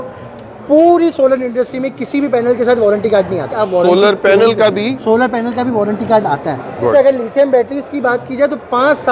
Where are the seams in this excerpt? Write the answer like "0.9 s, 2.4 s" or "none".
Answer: 3.5 s, 6.9 s